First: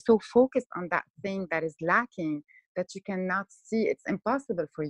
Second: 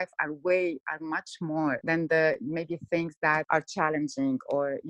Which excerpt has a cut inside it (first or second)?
second